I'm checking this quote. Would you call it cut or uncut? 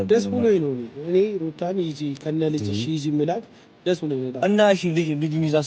cut